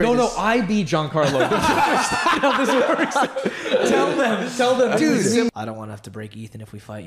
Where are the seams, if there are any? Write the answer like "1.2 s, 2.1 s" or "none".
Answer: 5.5 s